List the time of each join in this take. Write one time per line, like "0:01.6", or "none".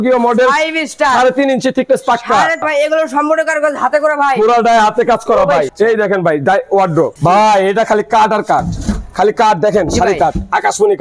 0:02.6
0:05.7

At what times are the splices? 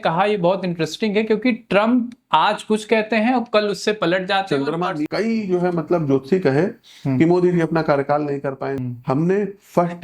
0:05.0
0:08.8

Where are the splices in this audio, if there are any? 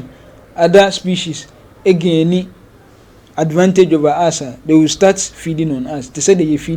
none

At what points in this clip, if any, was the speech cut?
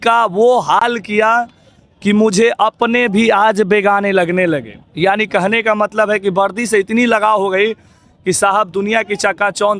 none

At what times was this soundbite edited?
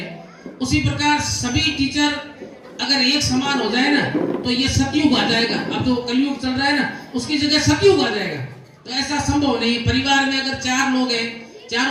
none

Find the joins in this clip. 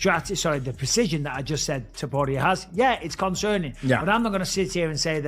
0:04.2

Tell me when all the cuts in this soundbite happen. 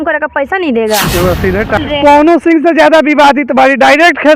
0:01.8

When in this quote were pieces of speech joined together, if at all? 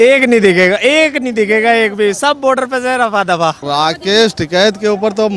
0:03.6

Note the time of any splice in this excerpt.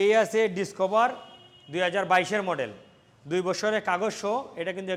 none

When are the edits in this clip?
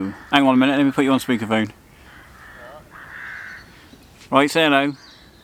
none

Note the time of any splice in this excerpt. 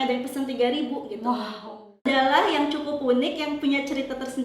0:02.0

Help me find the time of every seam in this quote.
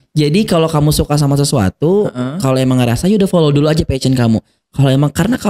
none

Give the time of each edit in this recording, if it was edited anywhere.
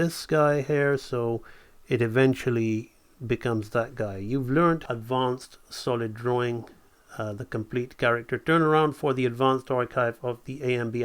0:04.8

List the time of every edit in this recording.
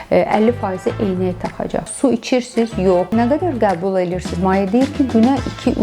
0:01.8
0:03.1

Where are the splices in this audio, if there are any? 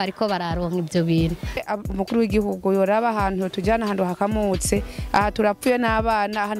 0:01.6

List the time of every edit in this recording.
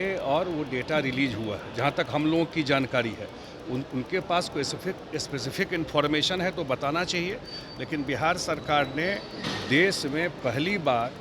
none

